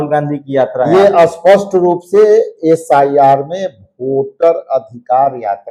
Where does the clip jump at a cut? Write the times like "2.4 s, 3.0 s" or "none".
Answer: none